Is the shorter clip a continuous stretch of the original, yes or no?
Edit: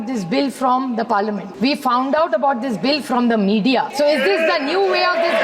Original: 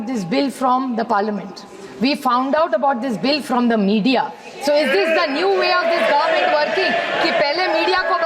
no